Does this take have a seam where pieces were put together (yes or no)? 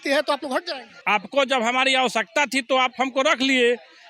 yes